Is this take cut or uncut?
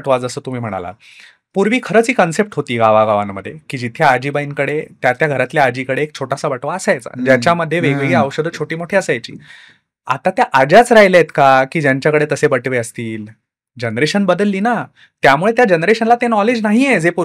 uncut